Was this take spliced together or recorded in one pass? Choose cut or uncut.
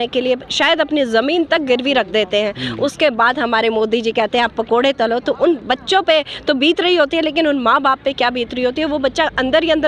uncut